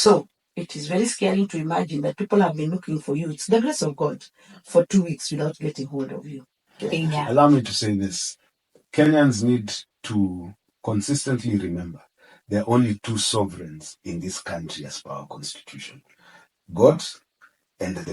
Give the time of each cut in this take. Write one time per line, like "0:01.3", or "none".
0:06.8